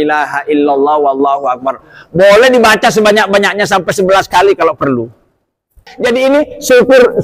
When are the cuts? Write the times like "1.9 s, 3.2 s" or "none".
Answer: 5.8 s